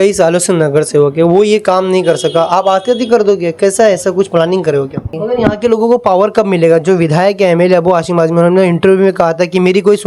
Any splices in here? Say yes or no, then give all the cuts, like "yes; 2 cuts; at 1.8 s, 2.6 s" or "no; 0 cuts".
yes; 1 cut; at 5.2 s